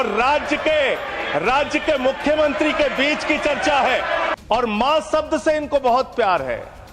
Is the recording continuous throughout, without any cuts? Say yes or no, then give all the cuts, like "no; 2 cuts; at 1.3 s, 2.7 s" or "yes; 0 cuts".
no; 1 cut; at 4.3 s